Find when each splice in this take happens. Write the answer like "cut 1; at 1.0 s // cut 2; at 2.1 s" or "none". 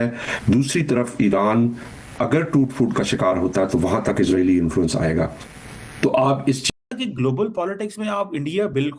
cut 1; at 6.7 s